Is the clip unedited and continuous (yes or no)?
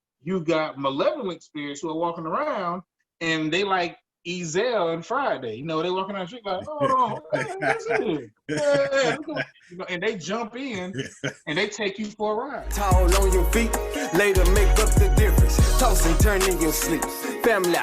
no